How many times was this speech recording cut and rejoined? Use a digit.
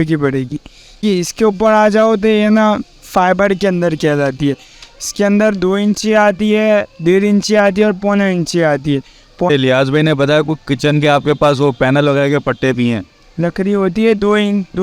2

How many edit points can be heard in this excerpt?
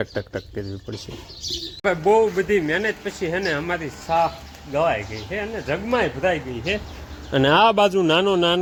0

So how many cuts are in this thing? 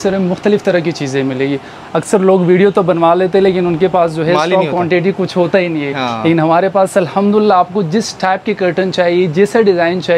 0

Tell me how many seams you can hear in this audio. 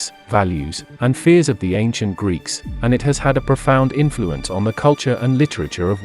0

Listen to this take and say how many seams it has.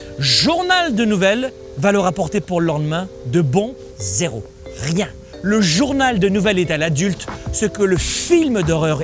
3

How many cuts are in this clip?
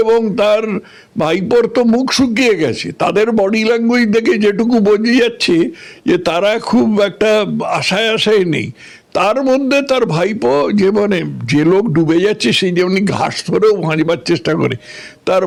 0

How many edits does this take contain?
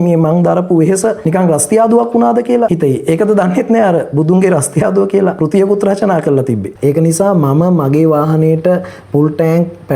4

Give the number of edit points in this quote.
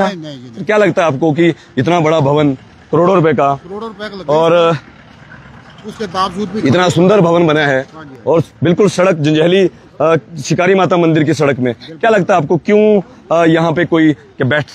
0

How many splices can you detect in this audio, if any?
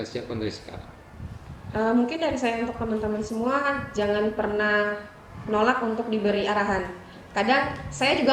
0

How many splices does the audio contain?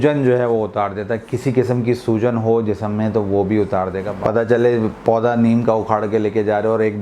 1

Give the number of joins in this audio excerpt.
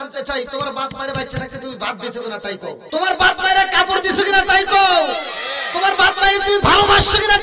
1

